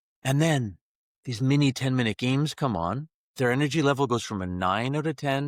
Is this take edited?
yes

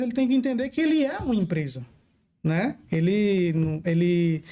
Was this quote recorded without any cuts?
yes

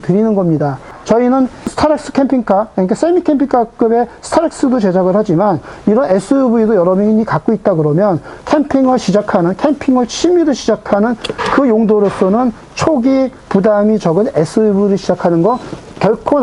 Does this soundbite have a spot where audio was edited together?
no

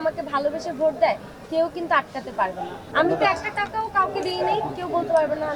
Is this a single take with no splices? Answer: no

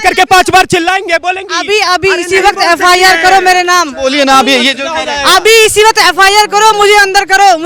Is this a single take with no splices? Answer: yes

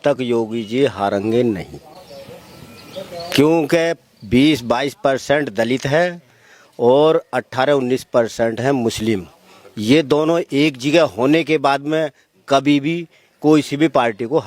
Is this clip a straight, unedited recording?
yes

